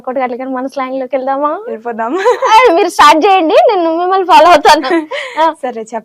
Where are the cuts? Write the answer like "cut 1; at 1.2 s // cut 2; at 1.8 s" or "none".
none